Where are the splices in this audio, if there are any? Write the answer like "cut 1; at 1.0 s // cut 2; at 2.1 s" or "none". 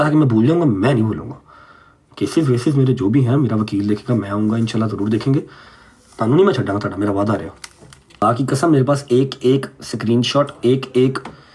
cut 1; at 8.2 s